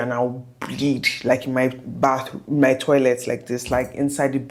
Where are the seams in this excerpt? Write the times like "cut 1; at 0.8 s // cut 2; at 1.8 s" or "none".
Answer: none